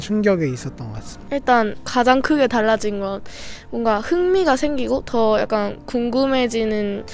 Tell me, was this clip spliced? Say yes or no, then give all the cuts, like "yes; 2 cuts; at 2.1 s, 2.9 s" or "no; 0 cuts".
no; 0 cuts